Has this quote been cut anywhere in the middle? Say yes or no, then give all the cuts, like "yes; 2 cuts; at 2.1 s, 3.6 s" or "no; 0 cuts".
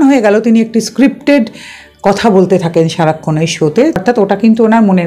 yes; 1 cut; at 4.0 s